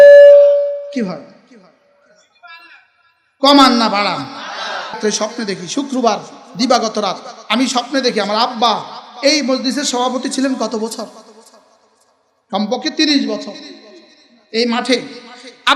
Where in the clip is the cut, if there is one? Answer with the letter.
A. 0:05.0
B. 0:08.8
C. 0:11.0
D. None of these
A